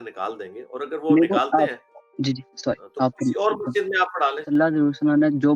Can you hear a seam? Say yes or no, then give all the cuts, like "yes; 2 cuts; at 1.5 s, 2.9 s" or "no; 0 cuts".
yes; 1 cut; at 4.4 s